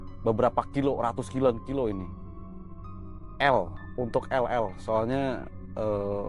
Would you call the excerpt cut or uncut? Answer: uncut